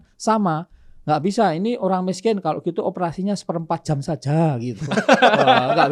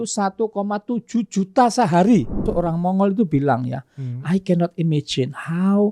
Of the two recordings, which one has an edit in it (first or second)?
second